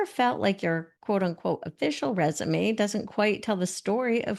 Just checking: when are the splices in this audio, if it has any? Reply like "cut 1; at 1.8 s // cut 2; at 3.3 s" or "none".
cut 1; at 0.9 s